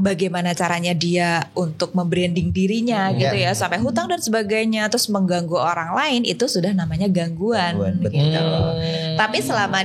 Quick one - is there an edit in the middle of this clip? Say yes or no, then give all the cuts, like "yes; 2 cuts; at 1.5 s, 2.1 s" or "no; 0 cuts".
no; 0 cuts